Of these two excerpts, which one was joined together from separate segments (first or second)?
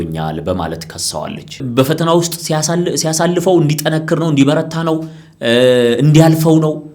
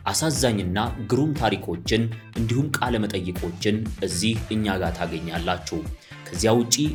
first